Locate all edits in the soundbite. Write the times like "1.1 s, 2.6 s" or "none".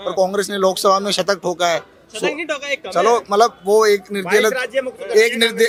none